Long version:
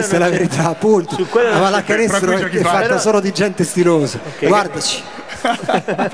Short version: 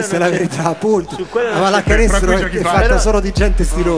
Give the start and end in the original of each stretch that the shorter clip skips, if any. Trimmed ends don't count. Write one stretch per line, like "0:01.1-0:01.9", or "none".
none